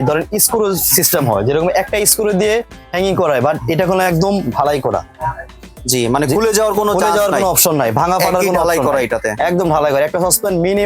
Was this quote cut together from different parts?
no; 0 cuts

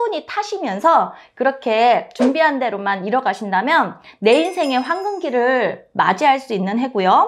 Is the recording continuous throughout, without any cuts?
yes; 0 cuts

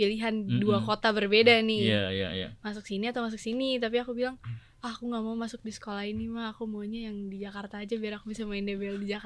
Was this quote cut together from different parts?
no; 0 cuts

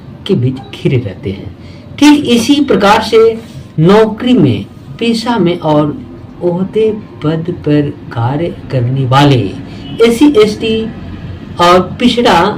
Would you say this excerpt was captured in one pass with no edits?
yes; 0 cuts

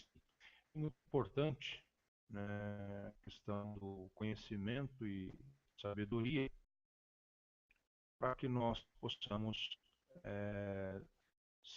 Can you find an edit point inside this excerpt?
yes; 1 cut; at 3.8 s

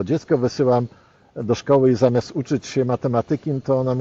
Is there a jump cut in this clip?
no; 0 cuts

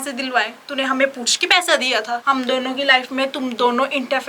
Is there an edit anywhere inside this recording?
yes; 1 cut; at 2.2 s

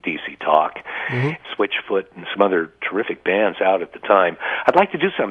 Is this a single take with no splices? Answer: no; 1 cut; at 1.4 s

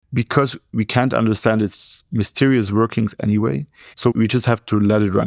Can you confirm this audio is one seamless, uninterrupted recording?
yes; 0 cuts

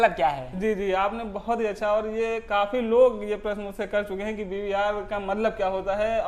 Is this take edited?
no; 0 cuts

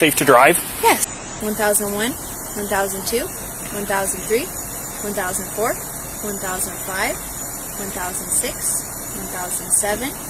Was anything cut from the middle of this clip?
yes; 1 cut; at 1.1 s

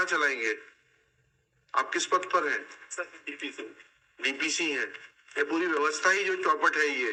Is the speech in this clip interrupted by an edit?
no; 0 cuts

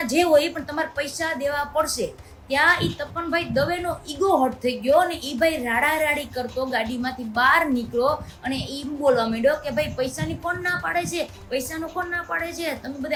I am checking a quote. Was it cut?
no; 0 cuts

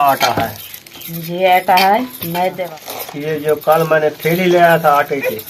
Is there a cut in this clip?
yes; 1 cut; at 2.6 s

